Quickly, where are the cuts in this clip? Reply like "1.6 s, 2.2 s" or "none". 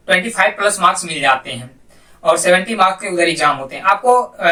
none